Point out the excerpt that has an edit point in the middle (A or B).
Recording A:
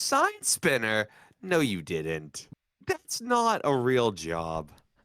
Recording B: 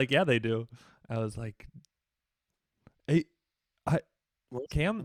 A